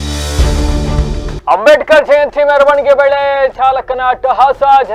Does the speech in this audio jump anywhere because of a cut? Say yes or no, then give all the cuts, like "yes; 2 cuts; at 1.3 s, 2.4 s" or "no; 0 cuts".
yes; 1 cut; at 1.3 s